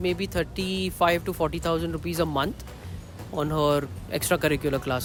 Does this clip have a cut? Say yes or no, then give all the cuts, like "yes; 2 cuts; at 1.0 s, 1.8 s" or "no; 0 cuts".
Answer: no; 0 cuts